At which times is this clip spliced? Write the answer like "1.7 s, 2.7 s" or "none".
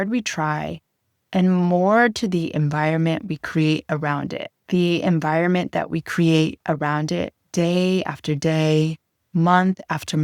4.5 s